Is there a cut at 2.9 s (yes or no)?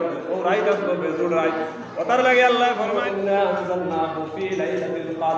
yes